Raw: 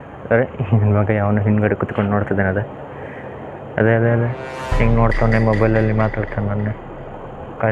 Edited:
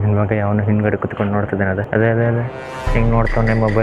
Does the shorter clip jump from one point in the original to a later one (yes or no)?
yes